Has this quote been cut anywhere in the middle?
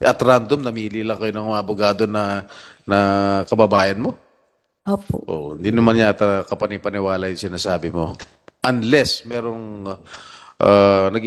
no; 0 cuts

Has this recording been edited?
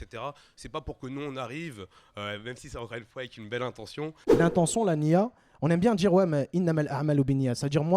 yes; 1 cut; at 4.2 s

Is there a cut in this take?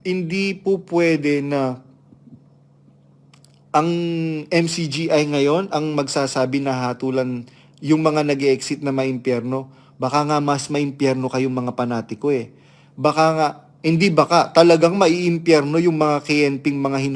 no; 0 cuts

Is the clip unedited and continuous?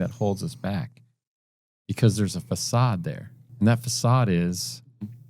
no; 1 cut; at 3.4 s

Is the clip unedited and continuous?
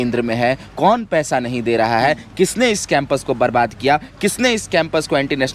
yes; 0 cuts

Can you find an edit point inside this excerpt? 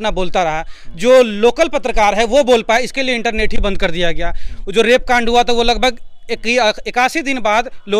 no; 0 cuts

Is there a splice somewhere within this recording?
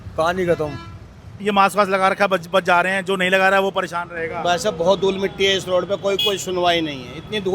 yes; 1 cut; at 1.3 s

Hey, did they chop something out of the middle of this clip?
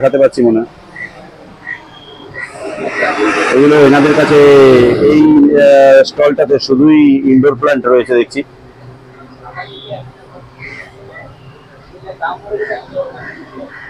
no; 0 cuts

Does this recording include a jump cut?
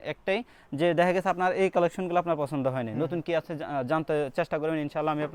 no; 0 cuts

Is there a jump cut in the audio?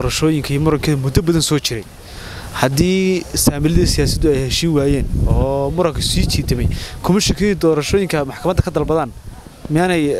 no; 0 cuts

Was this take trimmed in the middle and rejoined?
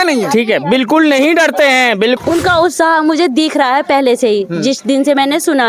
yes; 1 cut; at 2.2 s

